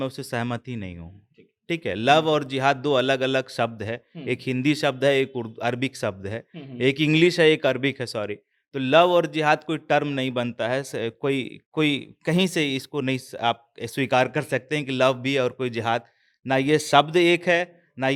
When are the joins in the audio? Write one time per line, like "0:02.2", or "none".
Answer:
none